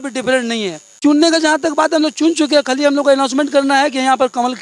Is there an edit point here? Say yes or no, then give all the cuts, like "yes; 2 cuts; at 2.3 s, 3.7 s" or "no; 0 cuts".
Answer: yes; 1 cut; at 1.0 s